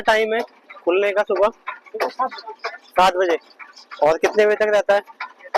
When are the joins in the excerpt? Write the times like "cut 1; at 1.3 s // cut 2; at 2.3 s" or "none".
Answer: none

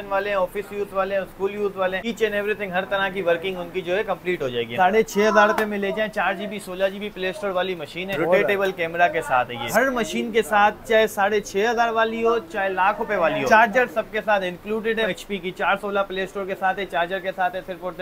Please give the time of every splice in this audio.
cut 1; at 2.0 s // cut 2; at 4.7 s // cut 3; at 8.1 s // cut 4; at 9.7 s // cut 5; at 13.4 s // cut 6; at 15.1 s

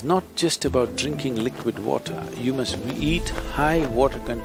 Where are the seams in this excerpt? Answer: none

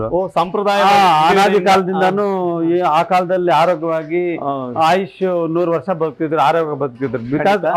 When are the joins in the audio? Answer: none

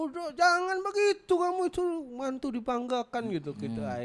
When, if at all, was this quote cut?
none

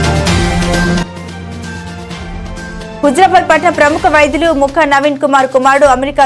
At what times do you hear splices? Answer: cut 1; at 1.4 s

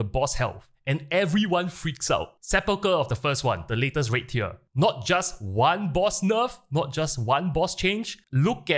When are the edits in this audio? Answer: cut 1; at 2.3 s

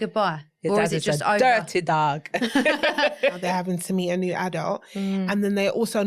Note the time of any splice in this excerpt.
cut 1; at 3.4 s

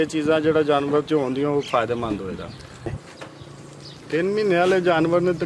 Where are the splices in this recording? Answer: cut 1; at 3.0 s

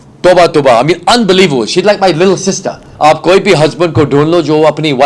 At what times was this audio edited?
cut 1; at 2.8 s

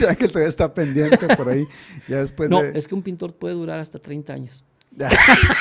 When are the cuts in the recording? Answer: none

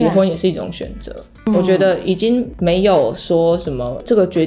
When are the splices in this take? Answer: cut 1; at 1.5 s

